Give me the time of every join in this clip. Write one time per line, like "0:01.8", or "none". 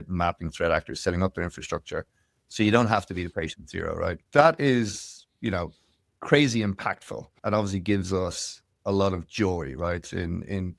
0:04.2
0:07.4